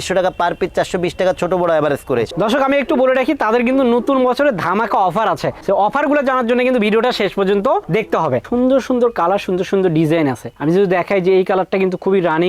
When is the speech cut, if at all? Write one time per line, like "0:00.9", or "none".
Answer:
0:02.3
0:08.4